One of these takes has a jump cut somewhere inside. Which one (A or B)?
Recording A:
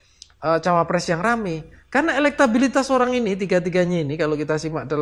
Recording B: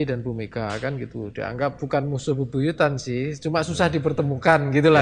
B